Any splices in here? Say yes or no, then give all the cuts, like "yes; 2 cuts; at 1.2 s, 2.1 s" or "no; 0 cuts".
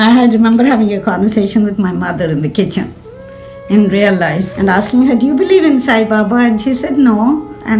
yes; 1 cut; at 4.5 s